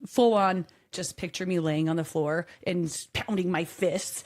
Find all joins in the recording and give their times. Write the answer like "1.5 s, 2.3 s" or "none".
0.9 s, 3.1 s